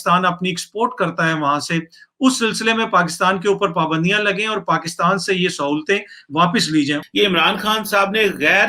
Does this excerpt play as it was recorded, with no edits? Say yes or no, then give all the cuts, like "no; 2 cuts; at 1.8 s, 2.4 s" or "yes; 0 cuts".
no; 1 cut; at 7.1 s